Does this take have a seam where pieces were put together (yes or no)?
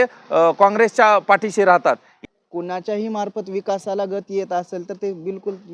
yes